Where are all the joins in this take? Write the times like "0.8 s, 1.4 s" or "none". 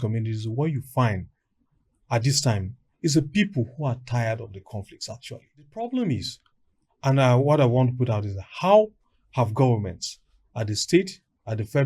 5.7 s